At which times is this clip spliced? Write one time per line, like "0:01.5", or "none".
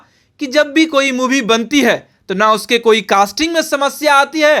none